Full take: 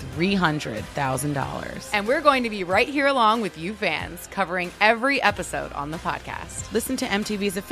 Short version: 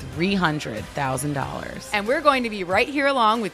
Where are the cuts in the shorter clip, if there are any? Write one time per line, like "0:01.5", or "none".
none